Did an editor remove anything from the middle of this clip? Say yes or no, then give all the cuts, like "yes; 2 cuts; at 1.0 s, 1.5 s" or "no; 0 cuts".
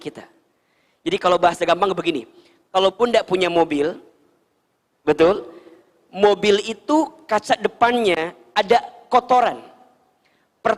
no; 0 cuts